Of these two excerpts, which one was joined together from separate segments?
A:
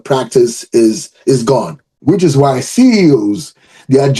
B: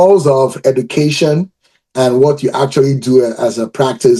A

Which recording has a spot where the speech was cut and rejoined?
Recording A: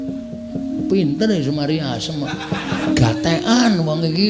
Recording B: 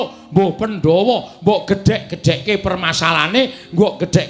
A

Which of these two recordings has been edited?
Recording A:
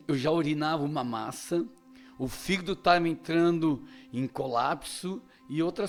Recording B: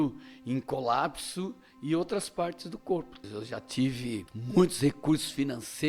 B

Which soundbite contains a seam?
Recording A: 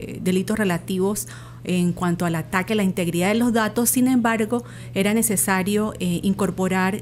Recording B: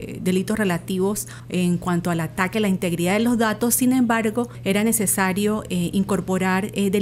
B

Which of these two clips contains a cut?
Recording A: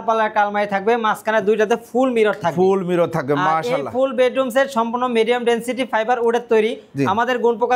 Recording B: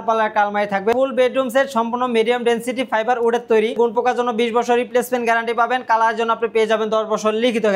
B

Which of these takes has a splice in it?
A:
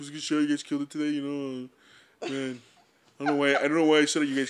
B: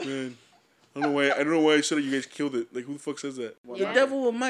B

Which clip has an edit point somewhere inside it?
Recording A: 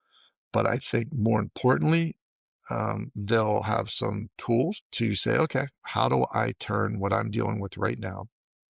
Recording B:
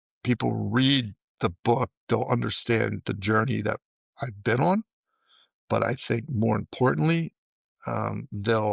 A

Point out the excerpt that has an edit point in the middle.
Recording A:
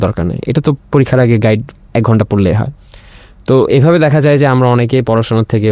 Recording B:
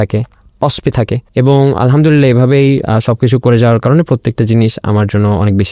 B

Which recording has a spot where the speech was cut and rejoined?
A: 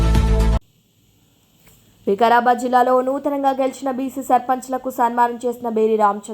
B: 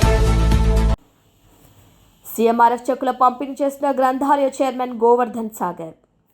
B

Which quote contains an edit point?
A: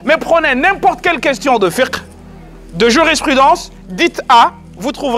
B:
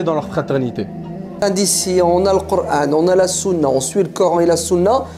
B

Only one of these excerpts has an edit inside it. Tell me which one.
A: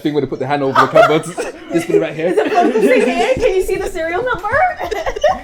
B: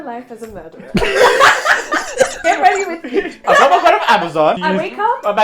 B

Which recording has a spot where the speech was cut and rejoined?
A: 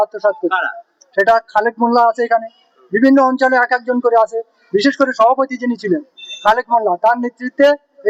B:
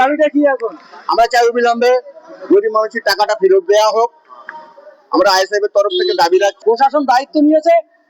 B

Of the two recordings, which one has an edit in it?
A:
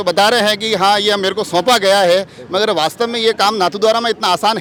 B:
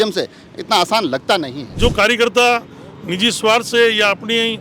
B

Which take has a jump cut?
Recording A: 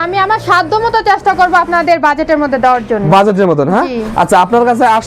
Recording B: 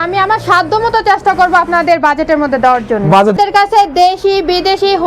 B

